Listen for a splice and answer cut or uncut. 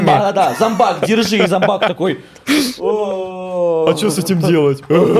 uncut